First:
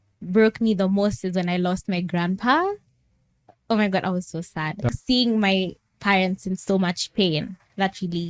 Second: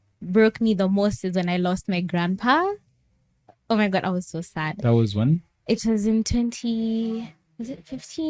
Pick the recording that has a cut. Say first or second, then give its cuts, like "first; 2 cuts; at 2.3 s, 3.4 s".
first; 1 cut; at 4.9 s